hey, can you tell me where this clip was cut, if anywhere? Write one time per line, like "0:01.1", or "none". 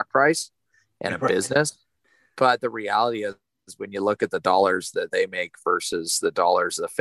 0:02.0